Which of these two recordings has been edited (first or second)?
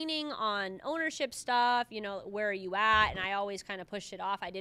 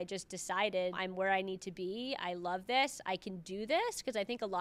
second